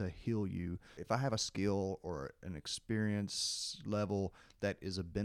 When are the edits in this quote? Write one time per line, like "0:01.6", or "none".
0:00.9